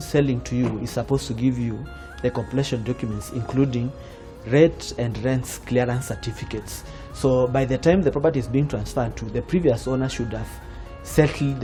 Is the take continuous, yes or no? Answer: yes